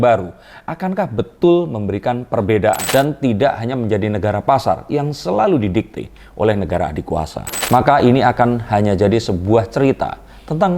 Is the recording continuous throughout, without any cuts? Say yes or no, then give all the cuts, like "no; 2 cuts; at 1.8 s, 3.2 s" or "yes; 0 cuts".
no; 2 cuts; at 2.8 s, 7.5 s